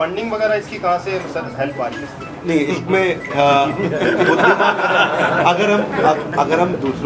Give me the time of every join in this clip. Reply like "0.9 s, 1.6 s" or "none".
none